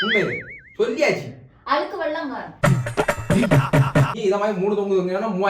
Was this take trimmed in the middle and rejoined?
yes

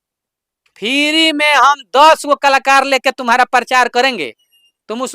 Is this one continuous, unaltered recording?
yes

